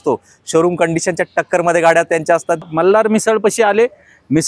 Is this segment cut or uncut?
cut